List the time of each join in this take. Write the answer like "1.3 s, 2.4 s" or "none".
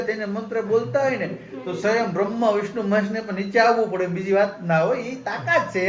none